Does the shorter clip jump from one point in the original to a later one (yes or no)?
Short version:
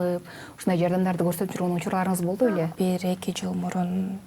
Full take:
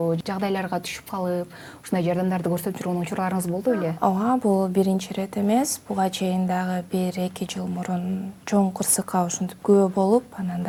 yes